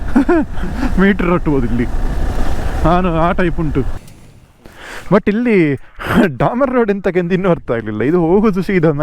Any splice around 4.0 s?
yes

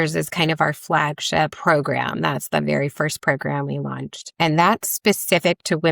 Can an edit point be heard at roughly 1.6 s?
yes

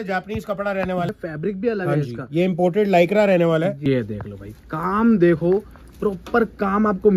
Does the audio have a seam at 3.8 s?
yes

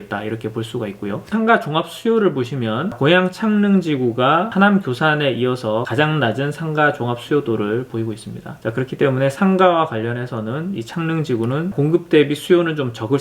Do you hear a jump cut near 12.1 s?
no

